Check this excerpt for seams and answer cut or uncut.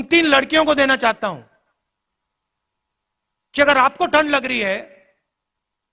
uncut